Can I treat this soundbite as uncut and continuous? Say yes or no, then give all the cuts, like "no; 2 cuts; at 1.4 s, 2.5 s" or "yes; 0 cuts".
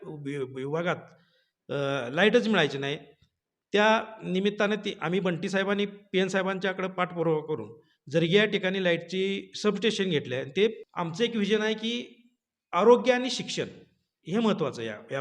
no; 1 cut; at 10.9 s